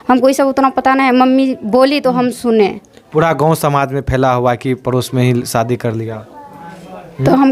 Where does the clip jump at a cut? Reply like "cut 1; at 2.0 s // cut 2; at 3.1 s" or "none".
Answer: none